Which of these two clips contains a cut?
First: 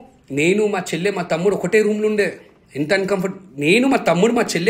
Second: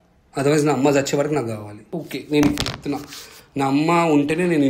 second; 1 cut; at 2.0 s

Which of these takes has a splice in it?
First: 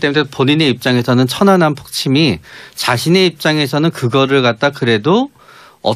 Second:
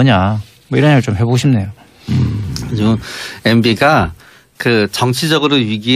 second; 1 cut; at 1.7 s

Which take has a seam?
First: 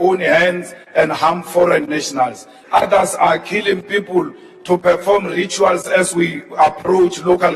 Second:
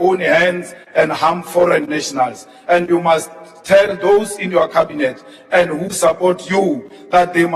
first; 1 cut; at 2.5 s

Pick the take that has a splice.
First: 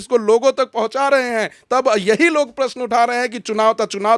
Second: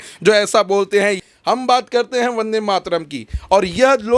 second; 1 cut; at 1.2 s

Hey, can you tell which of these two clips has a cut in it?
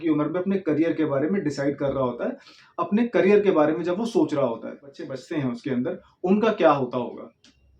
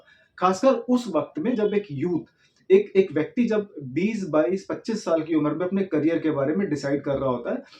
first; 1 cut; at 5.2 s

